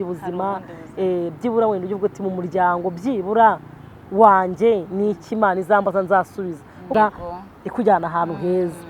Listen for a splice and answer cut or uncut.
cut